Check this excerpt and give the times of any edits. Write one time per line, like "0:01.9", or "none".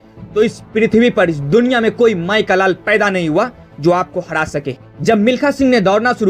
0:04.8